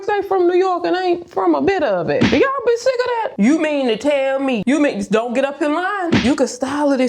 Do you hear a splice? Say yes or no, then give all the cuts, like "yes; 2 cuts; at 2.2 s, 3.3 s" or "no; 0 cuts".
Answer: yes; 3 cuts; at 3.3 s, 4.6 s, 6.2 s